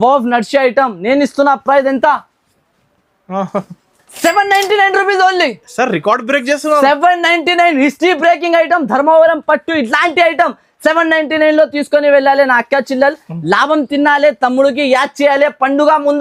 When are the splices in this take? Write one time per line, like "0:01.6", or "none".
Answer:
none